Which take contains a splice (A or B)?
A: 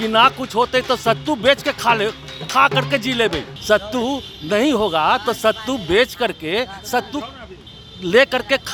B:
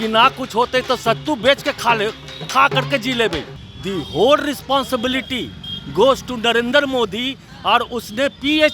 B